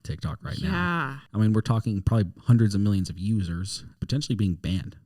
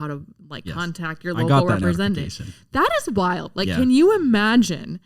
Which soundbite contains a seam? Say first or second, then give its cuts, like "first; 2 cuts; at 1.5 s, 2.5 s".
first; 2 cuts; at 1.2 s, 3.9 s